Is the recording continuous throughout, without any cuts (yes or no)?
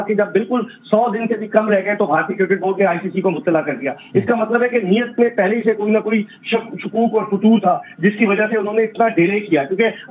yes